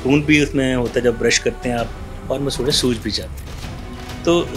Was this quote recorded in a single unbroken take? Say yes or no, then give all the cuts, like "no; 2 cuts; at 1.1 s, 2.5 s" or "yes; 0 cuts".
yes; 0 cuts